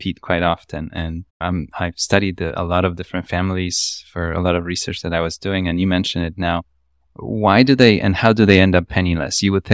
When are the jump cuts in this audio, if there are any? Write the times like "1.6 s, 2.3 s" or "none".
none